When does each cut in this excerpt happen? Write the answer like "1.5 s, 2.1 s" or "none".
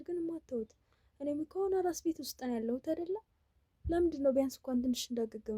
none